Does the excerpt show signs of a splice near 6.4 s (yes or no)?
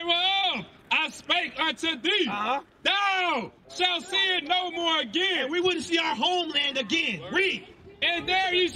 no